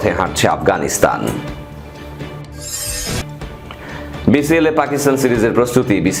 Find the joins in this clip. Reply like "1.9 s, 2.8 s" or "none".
none